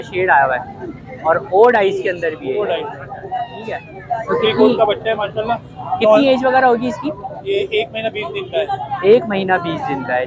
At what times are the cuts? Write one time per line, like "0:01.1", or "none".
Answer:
none

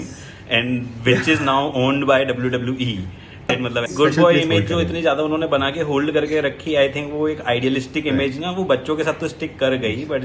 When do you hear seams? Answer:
0:03.4

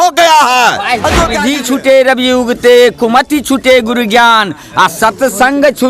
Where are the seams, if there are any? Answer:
0:01.4

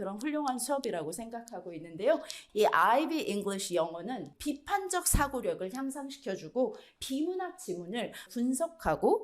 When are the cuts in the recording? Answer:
0:02.4
0:04.3
0:06.9
0:08.2

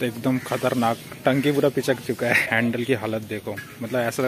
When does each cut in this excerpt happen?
0:02.5

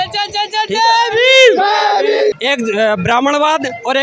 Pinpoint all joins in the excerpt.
0:02.4

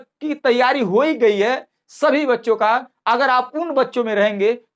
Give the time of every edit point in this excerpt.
none

